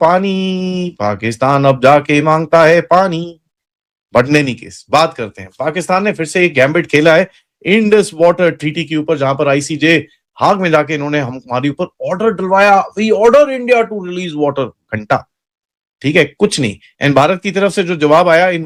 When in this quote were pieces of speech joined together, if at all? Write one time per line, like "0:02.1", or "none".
none